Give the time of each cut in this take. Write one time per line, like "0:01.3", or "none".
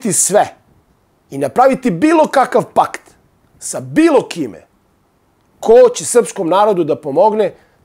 none